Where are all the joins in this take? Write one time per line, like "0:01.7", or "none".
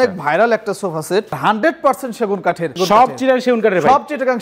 0:01.4
0:02.7